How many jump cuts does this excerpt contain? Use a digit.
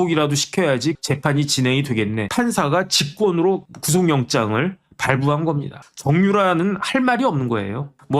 2